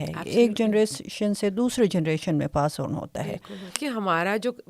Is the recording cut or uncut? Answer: cut